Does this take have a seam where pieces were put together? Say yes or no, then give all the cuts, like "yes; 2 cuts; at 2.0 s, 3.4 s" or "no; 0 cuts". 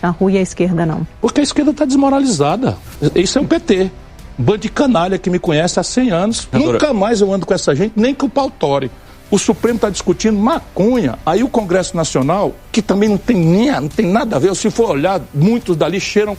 yes; 3 cuts; at 1.1 s, 6.5 s, 9.0 s